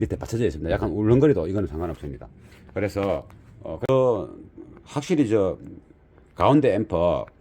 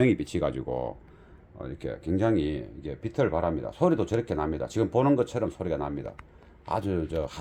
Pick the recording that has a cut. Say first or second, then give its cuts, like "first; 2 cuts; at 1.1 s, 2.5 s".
first; 1 cut; at 3.9 s